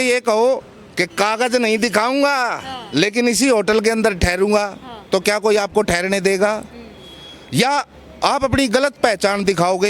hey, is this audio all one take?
yes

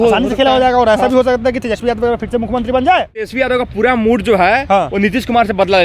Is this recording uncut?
no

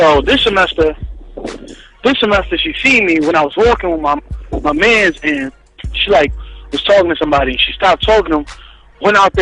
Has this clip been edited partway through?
yes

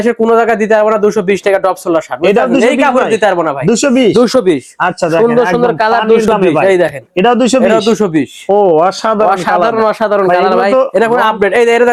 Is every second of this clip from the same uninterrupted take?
yes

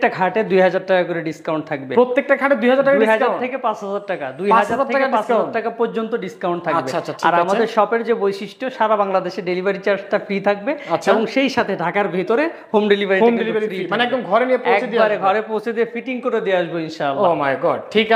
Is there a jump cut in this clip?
no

